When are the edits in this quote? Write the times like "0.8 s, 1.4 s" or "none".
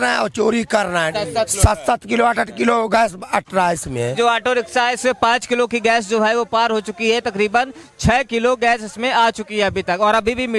1.1 s, 4.1 s